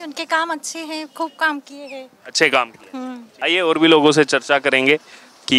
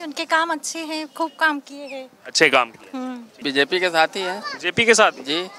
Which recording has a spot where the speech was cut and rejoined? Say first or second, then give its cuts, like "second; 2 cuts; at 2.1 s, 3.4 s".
second; 1 cut; at 3.2 s